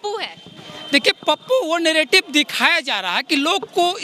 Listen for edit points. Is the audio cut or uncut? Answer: uncut